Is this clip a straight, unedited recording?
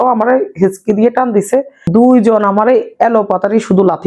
no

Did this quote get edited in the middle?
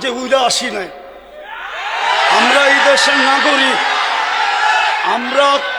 no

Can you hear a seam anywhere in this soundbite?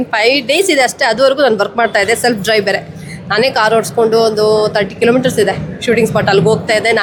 no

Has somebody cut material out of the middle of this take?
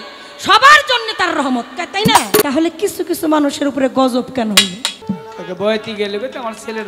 yes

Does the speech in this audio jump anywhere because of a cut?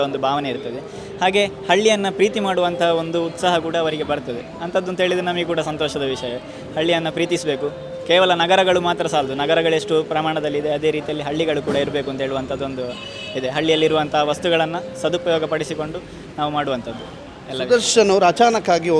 no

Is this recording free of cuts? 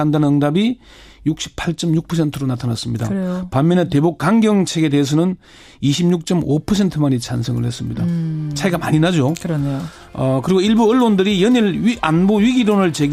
no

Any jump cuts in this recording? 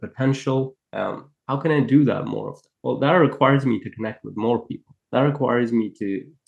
no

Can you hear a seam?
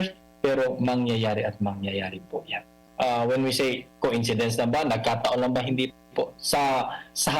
yes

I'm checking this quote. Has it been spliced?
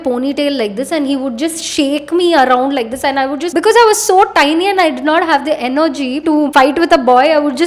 no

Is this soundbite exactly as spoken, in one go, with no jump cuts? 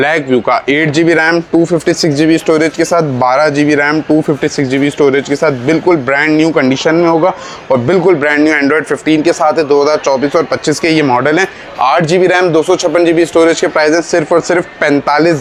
yes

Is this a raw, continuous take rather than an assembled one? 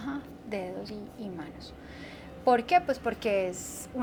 yes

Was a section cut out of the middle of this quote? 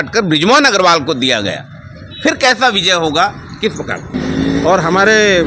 yes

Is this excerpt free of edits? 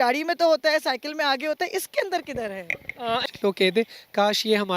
no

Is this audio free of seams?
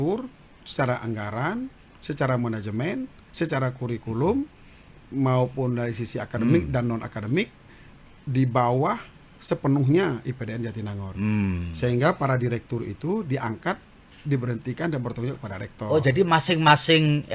yes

